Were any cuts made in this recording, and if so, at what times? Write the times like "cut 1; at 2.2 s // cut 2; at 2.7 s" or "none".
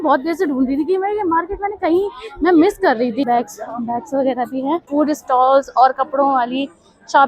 cut 1; at 3.2 s // cut 2; at 4.9 s